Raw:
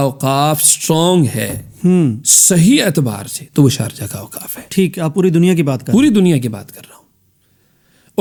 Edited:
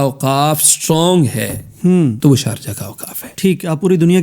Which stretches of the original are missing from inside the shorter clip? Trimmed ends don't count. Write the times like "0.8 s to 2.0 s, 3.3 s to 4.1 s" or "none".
2.2 s to 3.5 s